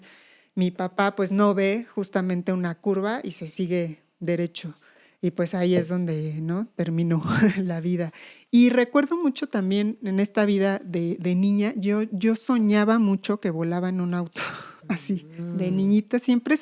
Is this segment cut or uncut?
uncut